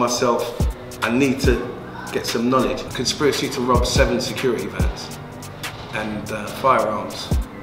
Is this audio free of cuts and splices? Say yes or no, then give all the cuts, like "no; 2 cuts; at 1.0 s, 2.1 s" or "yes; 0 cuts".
no; 1 cut; at 2.9 s